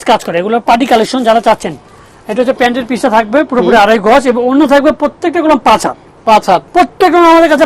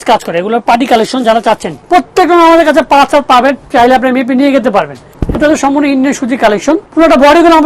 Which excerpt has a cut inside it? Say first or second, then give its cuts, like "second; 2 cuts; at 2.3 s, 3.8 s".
second; 3 cuts; at 1.8 s, 5.0 s, 6.9 s